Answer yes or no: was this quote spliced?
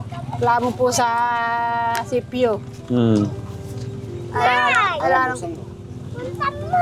no